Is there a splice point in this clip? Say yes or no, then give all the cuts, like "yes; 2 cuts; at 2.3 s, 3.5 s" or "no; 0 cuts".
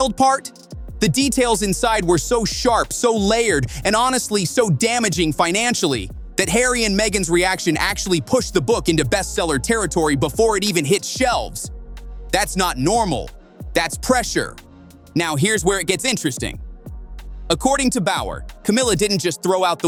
no; 0 cuts